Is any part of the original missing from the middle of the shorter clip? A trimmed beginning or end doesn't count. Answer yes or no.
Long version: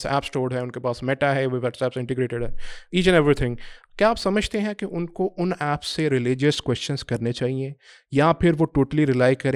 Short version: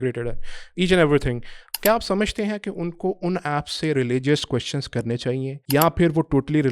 yes